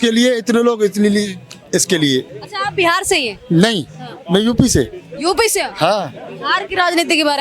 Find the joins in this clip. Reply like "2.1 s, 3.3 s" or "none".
2.4 s